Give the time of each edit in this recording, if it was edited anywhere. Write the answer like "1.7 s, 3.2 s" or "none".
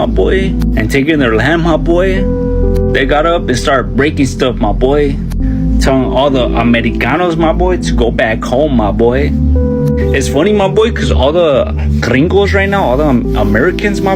none

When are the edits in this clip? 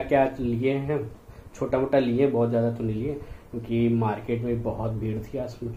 none

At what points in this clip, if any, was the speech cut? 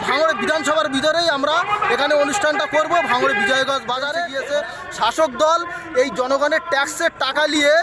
4.3 s

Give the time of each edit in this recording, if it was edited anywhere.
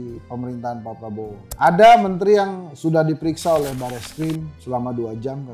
1.5 s

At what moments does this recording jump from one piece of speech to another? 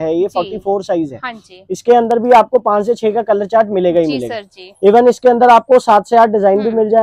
none

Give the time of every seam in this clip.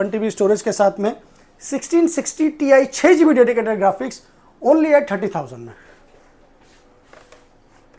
none

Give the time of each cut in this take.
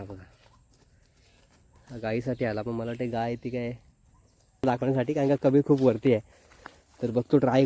4.6 s

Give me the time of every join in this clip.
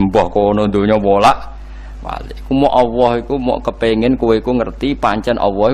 none

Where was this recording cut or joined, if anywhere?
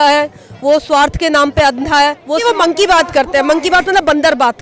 2.4 s

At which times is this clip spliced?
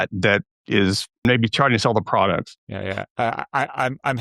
1.2 s, 2.6 s

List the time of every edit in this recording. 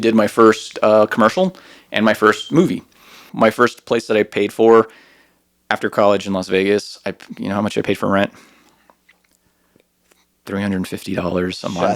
3.3 s

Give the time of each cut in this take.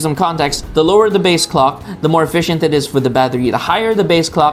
none

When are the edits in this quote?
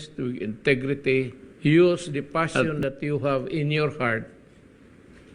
1.4 s

